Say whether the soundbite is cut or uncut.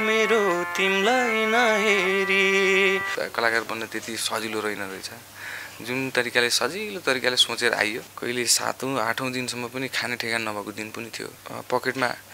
cut